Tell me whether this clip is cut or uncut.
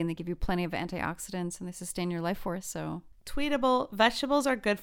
uncut